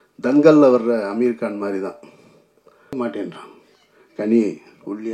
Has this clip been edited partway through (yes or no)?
yes